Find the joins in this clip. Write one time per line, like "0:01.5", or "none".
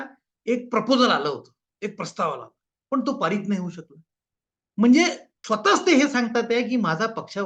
0:05.3